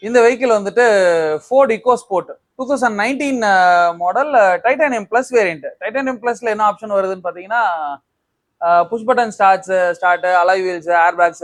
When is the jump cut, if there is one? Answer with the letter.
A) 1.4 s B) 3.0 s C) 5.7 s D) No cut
D